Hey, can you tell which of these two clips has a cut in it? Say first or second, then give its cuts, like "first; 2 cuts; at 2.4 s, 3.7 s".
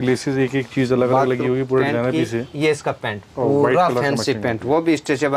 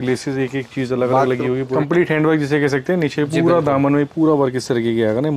second; 1 cut; at 1.7 s